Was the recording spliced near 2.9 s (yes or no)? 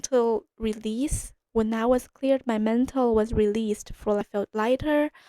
no